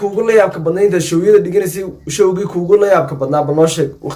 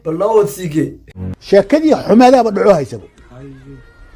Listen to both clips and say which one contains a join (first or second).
second